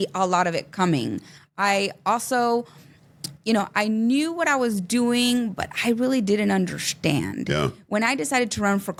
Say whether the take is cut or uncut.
uncut